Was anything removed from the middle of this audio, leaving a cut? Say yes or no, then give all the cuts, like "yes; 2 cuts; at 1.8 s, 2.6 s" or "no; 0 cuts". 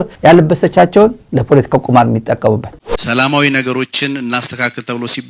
yes; 2 cuts; at 1.2 s, 2.8 s